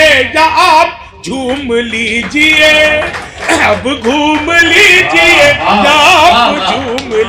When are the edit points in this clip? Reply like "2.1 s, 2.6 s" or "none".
none